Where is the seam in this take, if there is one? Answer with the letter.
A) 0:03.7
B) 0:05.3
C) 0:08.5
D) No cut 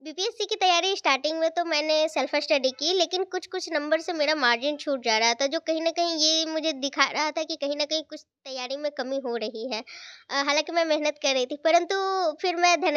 D